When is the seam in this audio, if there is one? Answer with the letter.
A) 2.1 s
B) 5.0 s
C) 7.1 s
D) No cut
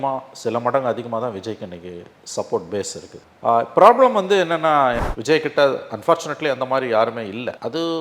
B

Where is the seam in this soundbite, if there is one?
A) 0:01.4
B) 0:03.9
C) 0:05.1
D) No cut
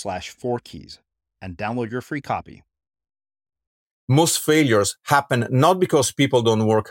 B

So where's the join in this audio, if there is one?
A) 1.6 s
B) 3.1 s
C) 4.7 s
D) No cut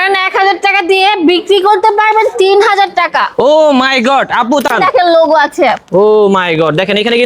C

